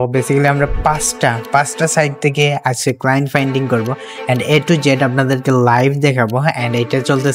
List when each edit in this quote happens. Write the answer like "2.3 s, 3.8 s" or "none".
none

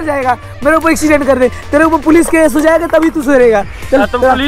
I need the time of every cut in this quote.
none

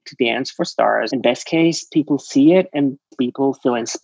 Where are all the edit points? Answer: 1.1 s, 3.1 s

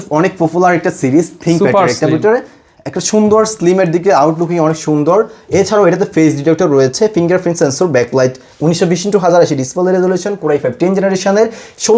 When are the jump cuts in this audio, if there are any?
none

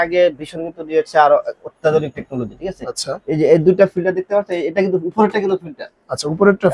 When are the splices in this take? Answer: none

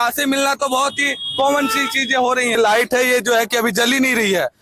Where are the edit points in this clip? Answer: 2.6 s

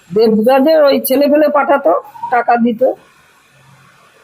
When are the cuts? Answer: none

